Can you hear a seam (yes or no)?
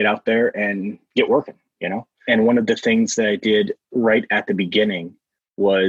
yes